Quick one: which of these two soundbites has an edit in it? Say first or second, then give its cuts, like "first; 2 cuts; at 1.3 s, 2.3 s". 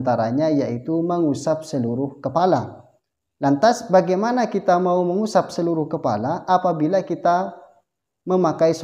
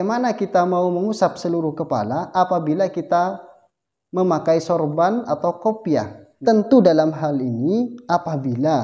second; 1 cut; at 6.2 s